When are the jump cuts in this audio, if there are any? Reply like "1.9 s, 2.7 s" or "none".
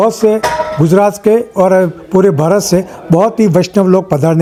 none